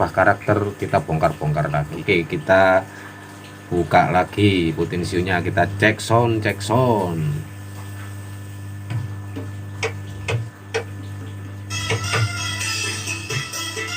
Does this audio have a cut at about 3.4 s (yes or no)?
no